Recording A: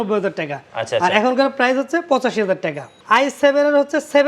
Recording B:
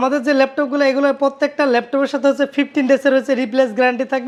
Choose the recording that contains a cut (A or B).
A